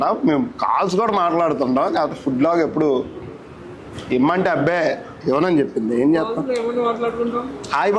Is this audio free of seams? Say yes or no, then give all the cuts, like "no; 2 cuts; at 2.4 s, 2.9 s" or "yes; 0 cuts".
yes; 0 cuts